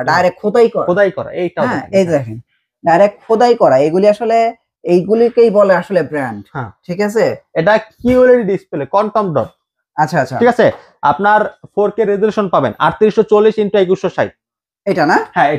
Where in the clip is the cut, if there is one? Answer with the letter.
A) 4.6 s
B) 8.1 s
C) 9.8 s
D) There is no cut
D